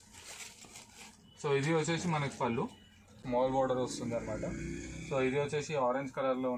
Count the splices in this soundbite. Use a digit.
1